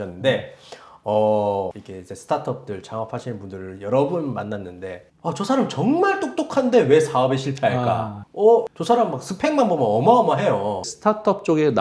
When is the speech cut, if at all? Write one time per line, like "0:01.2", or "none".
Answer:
0:01.7
0:10.9